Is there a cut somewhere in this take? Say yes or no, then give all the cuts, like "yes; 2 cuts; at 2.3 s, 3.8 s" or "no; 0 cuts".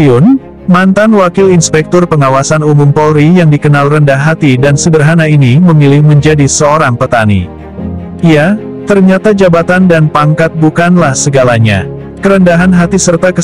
no; 0 cuts